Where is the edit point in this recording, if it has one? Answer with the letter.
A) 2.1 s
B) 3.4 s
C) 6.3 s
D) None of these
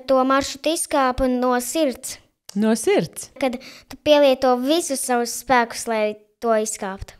B